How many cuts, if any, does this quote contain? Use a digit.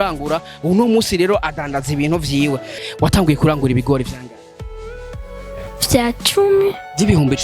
1